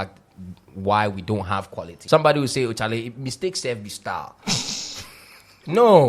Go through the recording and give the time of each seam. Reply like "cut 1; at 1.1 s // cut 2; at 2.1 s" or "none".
cut 1; at 1.9 s